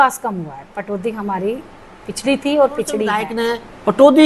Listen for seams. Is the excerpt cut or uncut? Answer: cut